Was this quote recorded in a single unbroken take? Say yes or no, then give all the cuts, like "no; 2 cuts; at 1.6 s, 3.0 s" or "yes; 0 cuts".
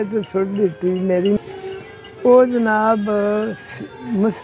no; 1 cut; at 1.4 s